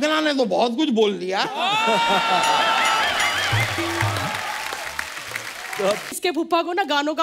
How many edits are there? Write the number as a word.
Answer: one